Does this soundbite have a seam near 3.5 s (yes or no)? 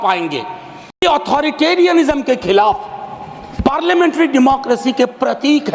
no